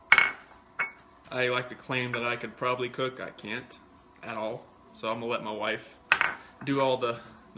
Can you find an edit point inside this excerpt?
no; 0 cuts

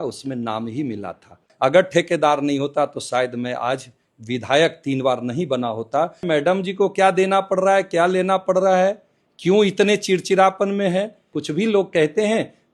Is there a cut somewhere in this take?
yes; 3 cuts; at 1.5 s, 6.2 s, 11.3 s

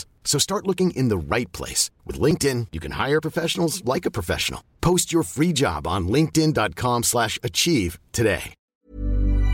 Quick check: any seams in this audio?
yes; 1 cut; at 8.6 s

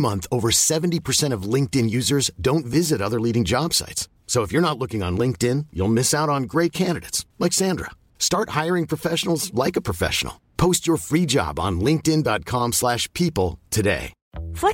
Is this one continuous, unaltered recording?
yes; 0 cuts

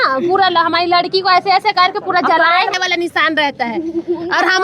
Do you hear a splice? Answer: yes; 1 cut; at 2.7 s

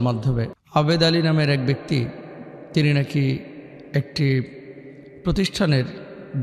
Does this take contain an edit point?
no; 0 cuts

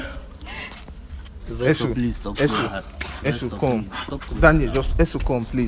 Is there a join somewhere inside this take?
no; 0 cuts

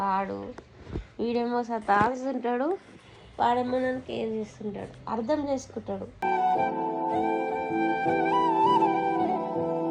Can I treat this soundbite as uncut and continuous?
yes; 0 cuts

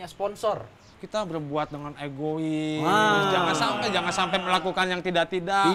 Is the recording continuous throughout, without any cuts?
no; 1 cut; at 1.0 s

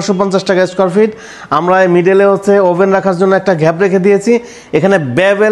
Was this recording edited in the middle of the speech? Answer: no; 0 cuts

